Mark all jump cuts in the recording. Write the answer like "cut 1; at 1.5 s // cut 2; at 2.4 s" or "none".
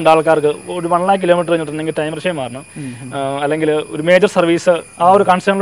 none